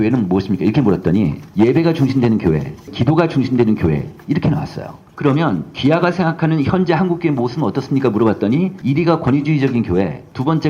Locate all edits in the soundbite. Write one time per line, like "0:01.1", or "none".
0:02.9
0:05.1